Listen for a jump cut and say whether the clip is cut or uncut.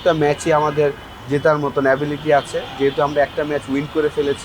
uncut